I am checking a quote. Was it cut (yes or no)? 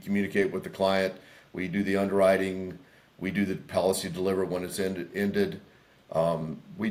no